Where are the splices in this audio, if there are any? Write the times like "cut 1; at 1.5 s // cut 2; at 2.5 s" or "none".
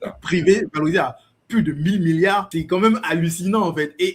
cut 1; at 2.5 s